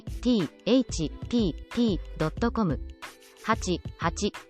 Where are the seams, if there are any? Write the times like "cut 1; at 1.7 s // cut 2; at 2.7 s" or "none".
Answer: cut 1; at 2.7 s